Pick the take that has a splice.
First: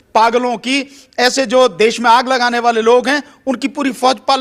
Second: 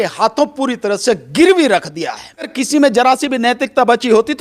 second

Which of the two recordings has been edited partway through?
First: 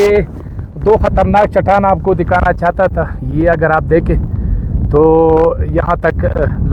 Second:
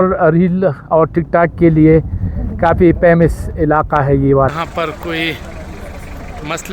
second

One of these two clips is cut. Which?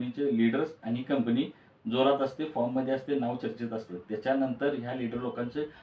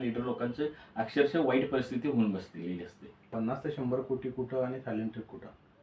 second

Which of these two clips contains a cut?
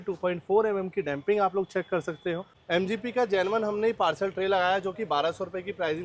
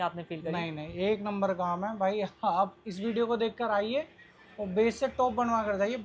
first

